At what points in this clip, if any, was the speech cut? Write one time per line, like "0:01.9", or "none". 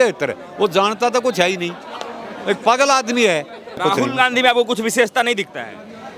0:03.8